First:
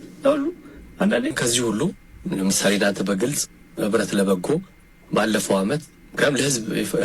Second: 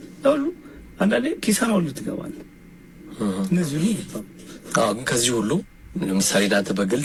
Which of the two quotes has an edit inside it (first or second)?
first